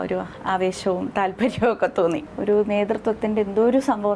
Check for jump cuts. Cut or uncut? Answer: cut